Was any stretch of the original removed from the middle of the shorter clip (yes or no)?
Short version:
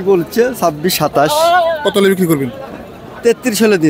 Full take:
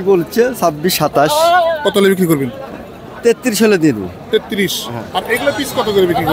no